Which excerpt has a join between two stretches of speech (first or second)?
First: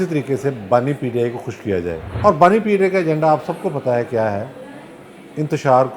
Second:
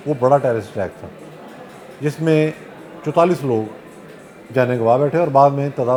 first